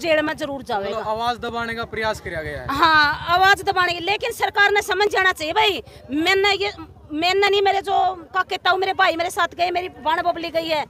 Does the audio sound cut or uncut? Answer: uncut